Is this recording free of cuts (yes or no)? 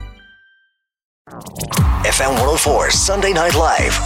no